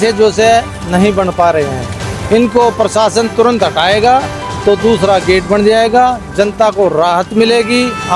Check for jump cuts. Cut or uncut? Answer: uncut